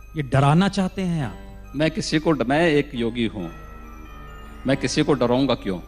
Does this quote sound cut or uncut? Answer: cut